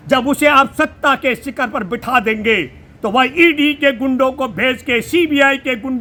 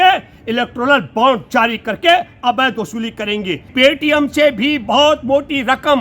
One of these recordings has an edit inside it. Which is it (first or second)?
second